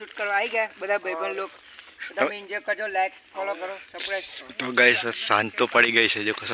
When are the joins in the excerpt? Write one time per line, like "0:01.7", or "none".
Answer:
0:04.4